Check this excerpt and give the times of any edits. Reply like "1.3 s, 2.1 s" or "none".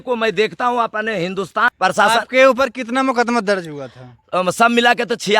1.6 s